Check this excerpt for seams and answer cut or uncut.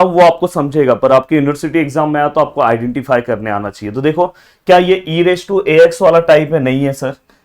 uncut